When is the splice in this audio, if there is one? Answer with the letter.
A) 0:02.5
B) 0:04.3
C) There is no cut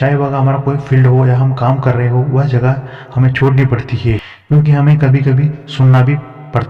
B